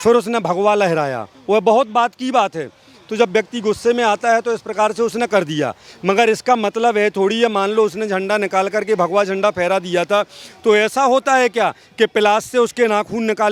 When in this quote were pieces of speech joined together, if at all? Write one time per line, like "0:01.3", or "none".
none